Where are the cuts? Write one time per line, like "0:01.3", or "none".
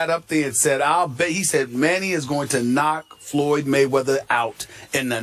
0:01.1